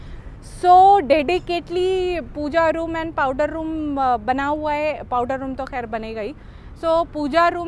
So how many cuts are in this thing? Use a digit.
0